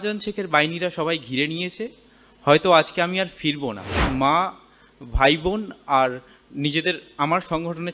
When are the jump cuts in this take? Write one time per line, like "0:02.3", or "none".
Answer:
0:04.0